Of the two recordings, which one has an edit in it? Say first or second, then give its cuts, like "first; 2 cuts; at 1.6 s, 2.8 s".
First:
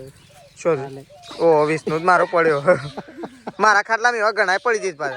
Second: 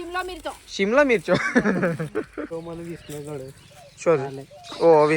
second; 1 cut; at 2.5 s